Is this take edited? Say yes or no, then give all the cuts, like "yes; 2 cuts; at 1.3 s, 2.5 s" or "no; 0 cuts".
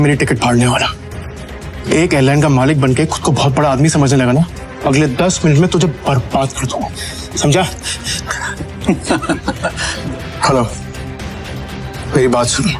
yes; 2 cuts; at 4.6 s, 9.9 s